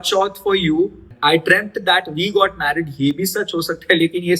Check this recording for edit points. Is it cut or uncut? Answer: cut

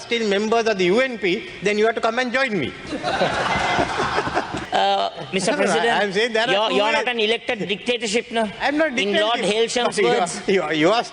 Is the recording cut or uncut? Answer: cut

